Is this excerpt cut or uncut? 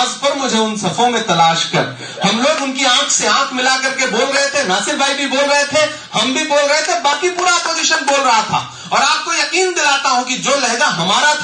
uncut